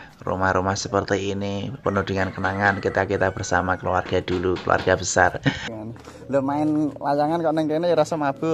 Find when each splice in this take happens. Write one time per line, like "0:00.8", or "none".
0:05.7